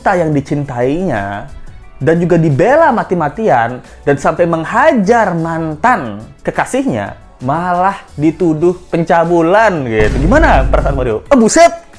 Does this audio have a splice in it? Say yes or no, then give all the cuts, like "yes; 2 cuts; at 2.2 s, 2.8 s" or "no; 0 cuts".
no; 0 cuts